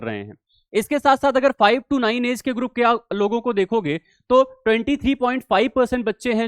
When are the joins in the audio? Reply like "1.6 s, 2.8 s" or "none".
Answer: none